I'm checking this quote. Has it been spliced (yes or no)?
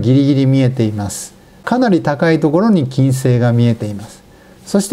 yes